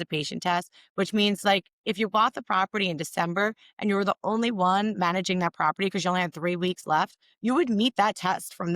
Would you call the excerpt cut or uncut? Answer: uncut